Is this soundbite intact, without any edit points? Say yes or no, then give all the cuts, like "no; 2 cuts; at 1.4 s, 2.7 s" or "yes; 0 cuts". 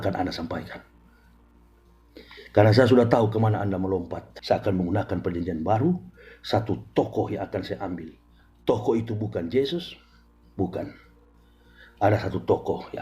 no; 1 cut; at 4.2 s